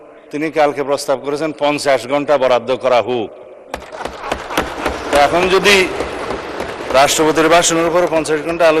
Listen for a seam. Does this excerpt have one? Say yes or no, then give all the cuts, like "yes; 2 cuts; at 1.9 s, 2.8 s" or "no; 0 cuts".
no; 0 cuts